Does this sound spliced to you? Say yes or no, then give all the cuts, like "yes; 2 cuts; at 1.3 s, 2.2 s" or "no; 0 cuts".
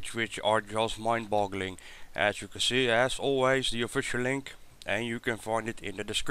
yes; 1 cut; at 3.2 s